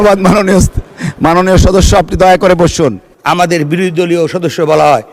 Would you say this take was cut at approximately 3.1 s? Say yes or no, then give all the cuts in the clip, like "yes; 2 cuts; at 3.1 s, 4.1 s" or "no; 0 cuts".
yes; 1 cut; at 3.1 s